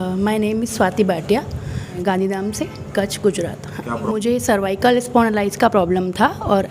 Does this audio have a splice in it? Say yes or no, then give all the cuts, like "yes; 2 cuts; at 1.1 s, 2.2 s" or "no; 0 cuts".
yes; 2 cuts; at 2.0 s, 4.0 s